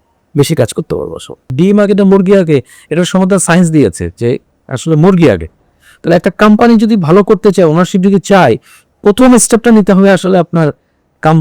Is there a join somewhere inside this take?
yes; 1 cut; at 1.5 s

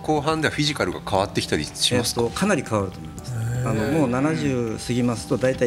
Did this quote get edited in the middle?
no; 0 cuts

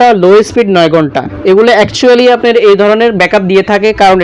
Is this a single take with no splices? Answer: yes; 0 cuts

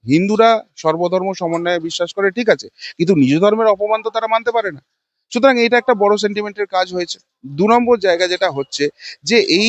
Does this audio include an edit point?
no; 0 cuts

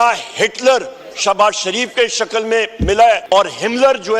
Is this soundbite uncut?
no; 1 cut; at 3.2 s

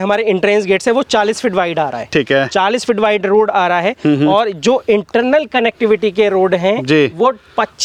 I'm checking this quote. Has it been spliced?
no; 0 cuts

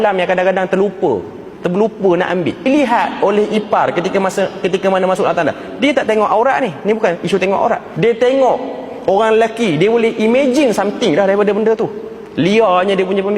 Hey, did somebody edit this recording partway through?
yes; 2 cuts; at 2.7 s, 7.9 s

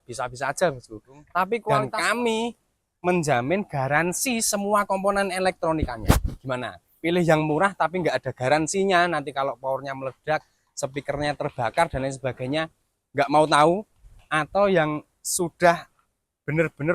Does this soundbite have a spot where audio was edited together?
yes; 1 cut; at 1.7 s

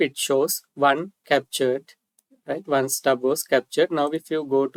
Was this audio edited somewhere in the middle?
no; 0 cuts

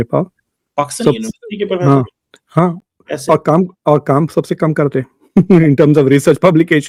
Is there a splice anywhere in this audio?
no; 0 cuts

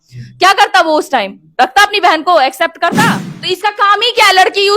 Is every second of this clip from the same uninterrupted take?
no; 1 cut; at 3.3 s

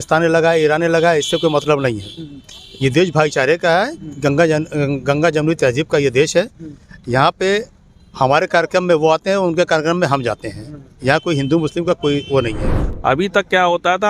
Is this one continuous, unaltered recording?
no; 1 cut; at 12.8 s

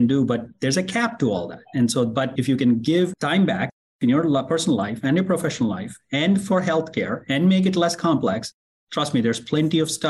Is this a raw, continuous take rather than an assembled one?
yes; 0 cuts

